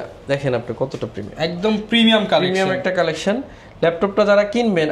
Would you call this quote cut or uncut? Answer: uncut